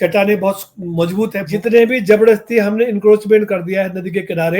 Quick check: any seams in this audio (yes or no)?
yes